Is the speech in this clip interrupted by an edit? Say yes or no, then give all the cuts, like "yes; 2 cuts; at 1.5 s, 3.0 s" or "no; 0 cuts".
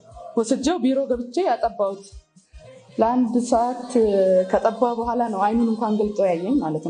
no; 0 cuts